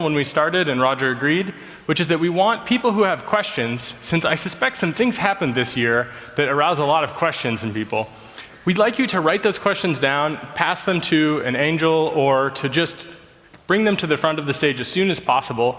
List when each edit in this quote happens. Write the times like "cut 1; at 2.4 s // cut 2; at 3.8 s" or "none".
cut 1; at 5.2 s